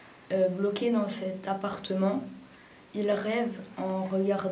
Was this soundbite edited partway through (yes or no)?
no